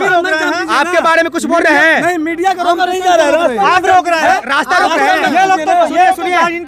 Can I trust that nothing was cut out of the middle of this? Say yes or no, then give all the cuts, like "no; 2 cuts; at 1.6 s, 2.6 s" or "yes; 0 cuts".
yes; 0 cuts